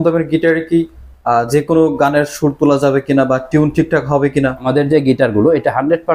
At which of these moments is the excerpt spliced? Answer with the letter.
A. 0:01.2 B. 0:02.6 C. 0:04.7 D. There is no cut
C